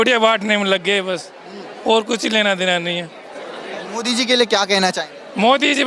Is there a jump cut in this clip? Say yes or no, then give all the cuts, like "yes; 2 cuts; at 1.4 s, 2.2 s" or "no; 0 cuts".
no; 0 cuts